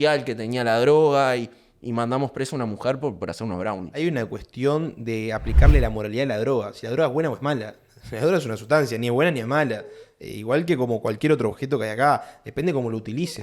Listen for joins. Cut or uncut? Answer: cut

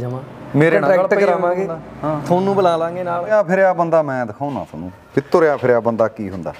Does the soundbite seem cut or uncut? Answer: cut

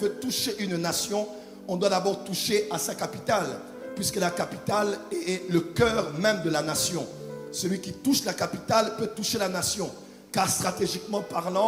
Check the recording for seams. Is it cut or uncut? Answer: uncut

